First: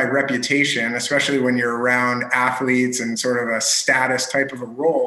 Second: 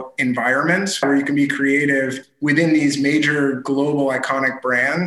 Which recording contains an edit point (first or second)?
second